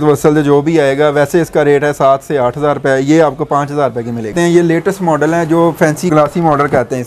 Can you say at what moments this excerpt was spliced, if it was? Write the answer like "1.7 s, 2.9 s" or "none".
4.3 s